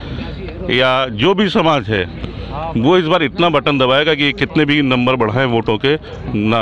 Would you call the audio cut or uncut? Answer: uncut